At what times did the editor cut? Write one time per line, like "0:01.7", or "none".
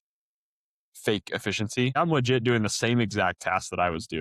0:01.9